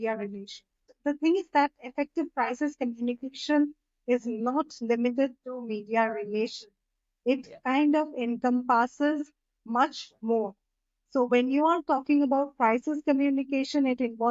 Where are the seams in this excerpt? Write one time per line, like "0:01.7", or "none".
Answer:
0:00.9